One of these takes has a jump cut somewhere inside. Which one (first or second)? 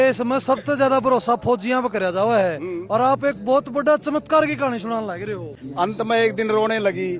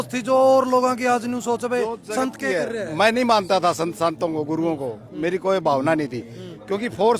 first